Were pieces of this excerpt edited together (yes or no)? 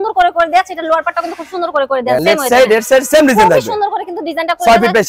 no